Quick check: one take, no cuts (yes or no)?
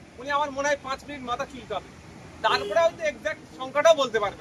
yes